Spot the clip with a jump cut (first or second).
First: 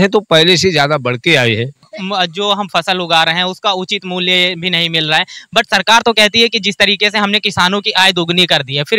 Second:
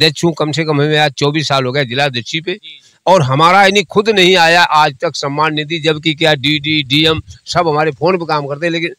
first